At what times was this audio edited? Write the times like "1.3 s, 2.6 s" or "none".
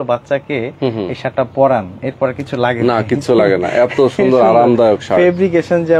none